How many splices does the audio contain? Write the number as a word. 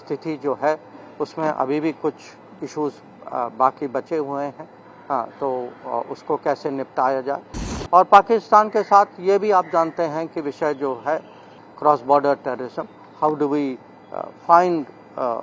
one